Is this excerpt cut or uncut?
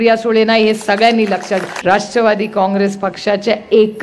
cut